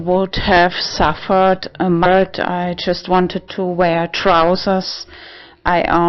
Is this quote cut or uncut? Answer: uncut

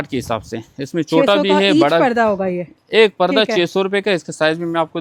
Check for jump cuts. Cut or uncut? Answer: uncut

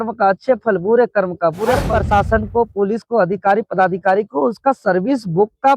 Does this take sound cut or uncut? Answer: cut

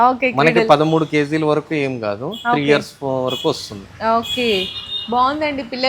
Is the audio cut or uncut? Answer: uncut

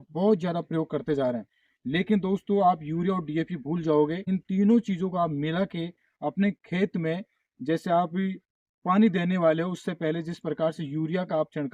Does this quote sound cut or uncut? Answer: cut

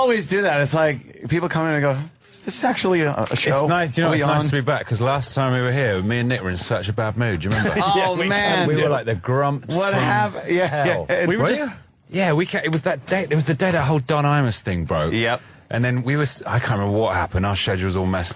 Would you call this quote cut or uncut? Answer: uncut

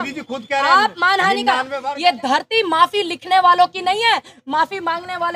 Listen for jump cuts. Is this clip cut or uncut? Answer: cut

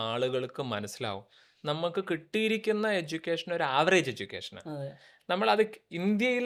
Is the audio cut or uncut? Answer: uncut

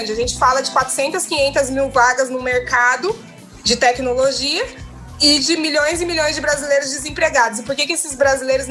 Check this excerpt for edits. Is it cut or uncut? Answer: uncut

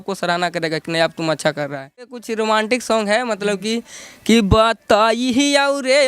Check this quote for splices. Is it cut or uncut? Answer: cut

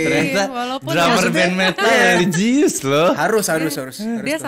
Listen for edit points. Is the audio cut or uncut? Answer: uncut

